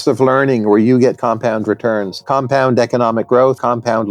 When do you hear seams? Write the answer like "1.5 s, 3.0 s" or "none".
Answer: 2.2 s

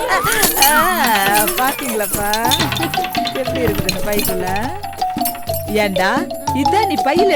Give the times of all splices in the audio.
none

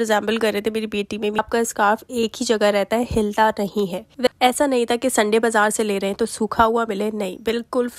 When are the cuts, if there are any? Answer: 1.4 s, 4.3 s

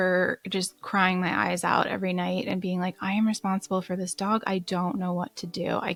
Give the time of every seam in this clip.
none

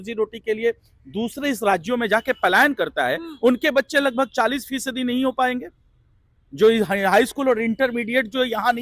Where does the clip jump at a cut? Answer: none

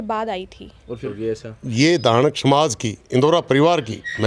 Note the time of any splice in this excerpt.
1.1 s

